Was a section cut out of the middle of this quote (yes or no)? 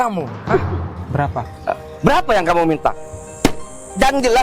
yes